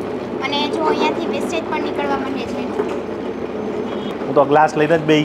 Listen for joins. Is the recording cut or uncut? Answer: cut